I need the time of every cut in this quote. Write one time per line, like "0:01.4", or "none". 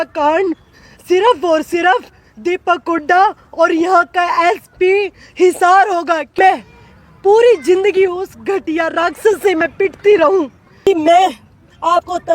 0:06.4
0:10.9